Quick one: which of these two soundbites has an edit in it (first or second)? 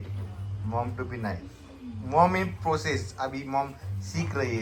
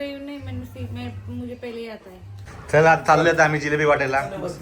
second